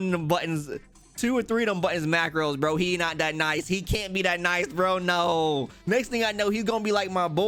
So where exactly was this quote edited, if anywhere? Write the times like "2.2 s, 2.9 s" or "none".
none

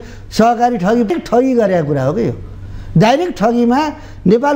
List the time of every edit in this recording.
1.1 s

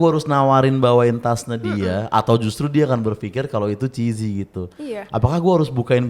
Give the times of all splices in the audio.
none

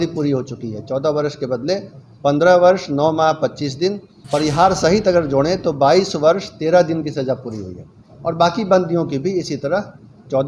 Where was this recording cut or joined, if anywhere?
4.1 s

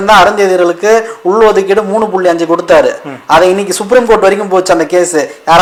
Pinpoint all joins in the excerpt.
none

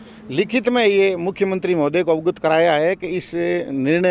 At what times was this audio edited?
none

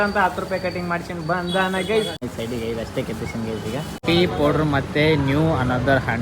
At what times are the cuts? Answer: 2.2 s, 4.0 s

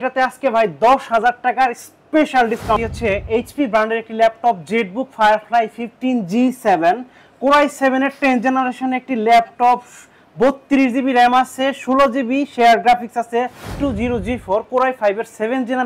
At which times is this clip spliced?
2.8 s, 13.6 s

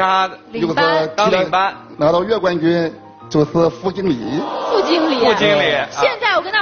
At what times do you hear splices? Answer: 1.8 s

